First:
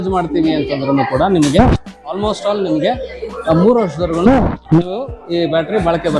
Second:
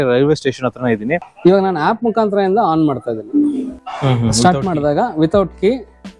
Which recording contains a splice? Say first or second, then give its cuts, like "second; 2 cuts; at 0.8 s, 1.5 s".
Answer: second; 2 cuts; at 1.2 s, 3.8 s